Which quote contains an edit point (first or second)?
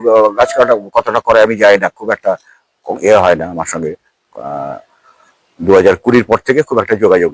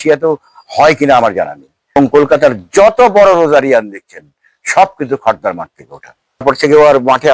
second